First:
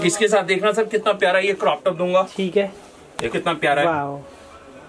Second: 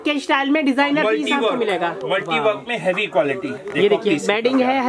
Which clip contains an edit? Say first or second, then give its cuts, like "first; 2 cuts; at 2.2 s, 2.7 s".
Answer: first; 1 cut; at 3.3 s